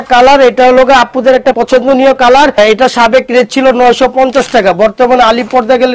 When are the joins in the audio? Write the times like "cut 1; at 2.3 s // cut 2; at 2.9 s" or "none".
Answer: cut 1; at 1.6 s // cut 2; at 2.6 s